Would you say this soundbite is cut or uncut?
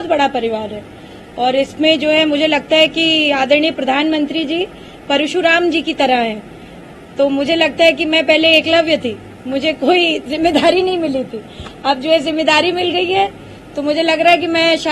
uncut